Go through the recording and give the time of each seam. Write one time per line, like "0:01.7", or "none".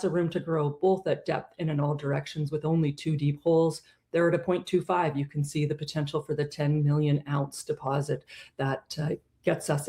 none